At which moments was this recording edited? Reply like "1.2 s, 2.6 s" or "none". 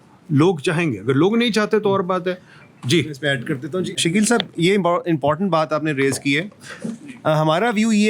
none